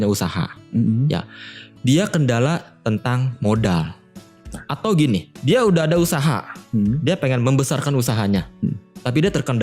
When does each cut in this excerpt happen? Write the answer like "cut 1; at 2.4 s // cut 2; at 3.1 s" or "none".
none